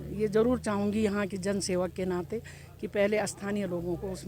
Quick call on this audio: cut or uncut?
uncut